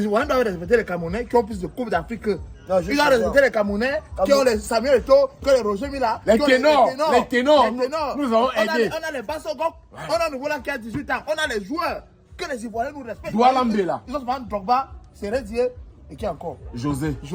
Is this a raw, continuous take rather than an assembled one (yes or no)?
yes